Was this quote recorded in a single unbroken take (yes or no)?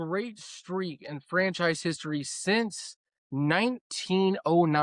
yes